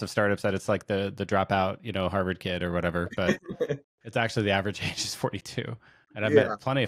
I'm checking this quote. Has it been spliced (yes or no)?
no